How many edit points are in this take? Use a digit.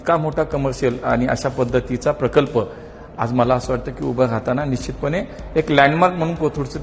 0